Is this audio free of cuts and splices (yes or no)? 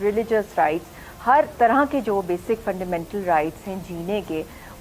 yes